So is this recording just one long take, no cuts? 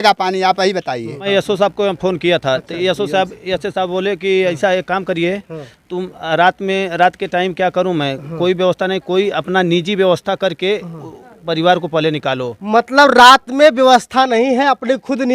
no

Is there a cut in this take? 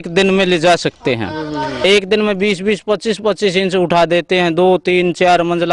yes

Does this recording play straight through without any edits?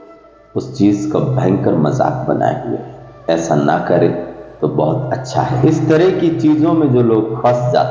no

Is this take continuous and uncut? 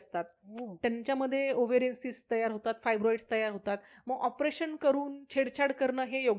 yes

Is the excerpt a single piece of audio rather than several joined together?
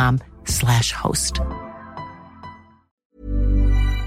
no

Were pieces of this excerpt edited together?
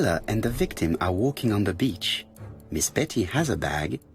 no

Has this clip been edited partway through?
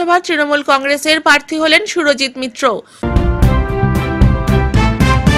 yes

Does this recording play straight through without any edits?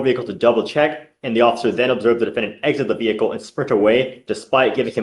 yes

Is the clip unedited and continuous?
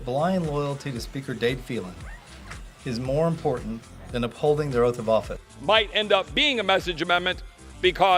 yes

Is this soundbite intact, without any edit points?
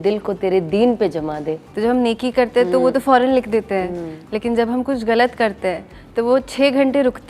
no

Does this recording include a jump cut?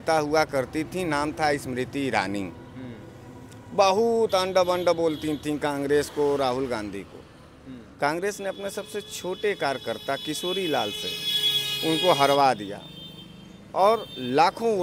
no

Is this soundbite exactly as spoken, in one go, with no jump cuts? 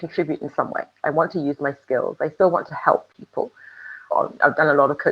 no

